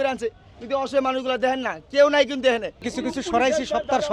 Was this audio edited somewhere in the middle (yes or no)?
yes